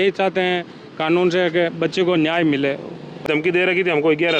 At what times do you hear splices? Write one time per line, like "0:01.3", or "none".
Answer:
0:03.4